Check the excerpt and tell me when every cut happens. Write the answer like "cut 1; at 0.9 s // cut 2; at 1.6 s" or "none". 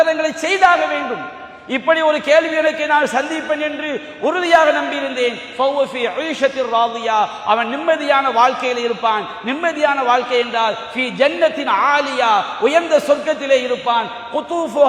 none